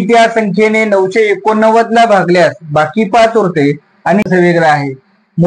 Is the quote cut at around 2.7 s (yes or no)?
no